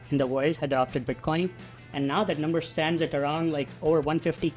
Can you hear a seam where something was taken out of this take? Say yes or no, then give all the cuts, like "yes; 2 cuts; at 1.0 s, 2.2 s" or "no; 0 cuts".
no; 0 cuts